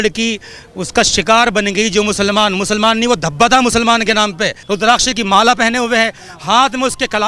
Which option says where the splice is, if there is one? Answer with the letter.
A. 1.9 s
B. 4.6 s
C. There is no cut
B